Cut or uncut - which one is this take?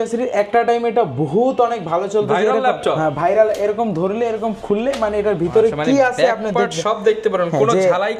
uncut